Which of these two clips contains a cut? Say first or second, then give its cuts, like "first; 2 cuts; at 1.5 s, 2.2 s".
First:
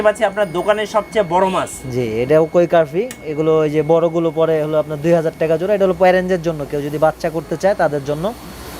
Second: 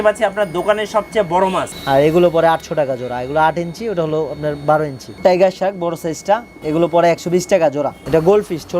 second; 4 cuts; at 1.7 s, 5.1 s, 6.5 s, 8.0 s